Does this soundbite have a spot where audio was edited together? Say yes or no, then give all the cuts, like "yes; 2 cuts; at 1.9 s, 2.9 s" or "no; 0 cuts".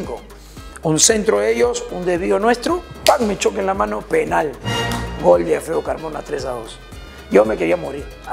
no; 0 cuts